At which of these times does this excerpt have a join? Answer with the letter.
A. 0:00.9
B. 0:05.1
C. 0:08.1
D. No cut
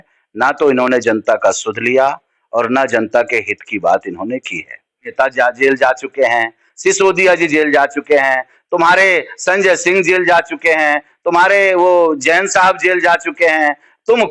B